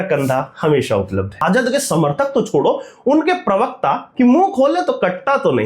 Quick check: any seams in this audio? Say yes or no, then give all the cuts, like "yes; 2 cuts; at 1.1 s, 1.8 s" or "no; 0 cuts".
yes; 2 cuts; at 1.4 s, 4.0 s